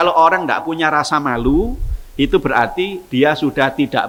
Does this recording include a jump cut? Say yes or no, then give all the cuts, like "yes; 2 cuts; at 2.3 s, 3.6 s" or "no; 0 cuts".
no; 0 cuts